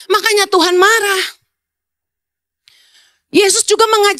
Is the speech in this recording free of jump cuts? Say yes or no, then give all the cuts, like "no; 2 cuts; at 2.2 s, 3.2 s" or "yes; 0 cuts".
yes; 0 cuts